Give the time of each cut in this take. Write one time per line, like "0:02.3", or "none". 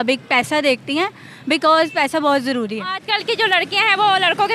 0:03.0